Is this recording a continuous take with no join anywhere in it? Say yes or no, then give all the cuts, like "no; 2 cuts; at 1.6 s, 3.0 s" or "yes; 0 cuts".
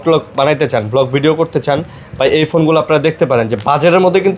yes; 0 cuts